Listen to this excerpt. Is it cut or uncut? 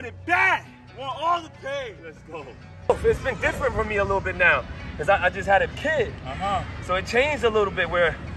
cut